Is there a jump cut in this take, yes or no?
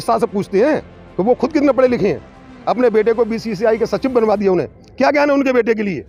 no